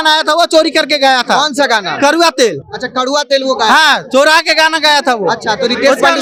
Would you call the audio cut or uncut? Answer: uncut